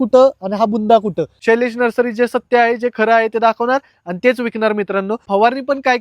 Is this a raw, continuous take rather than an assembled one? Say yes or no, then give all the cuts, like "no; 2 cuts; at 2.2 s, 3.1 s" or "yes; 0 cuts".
no; 2 cuts; at 1.3 s, 5.2 s